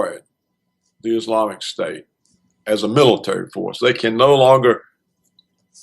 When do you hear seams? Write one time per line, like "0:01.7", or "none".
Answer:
0:02.9